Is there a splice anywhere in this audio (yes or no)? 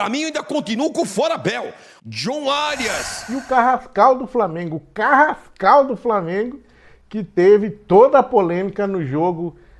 yes